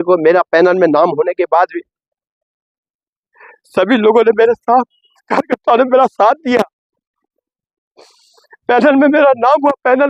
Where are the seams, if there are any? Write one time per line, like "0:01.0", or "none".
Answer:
none